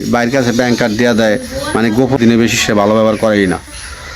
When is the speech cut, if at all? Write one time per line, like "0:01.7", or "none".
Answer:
0:02.2